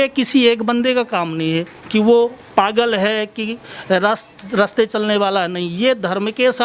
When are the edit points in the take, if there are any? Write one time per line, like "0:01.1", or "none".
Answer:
none